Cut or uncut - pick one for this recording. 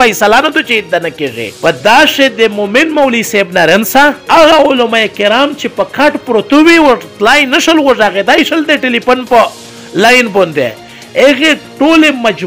uncut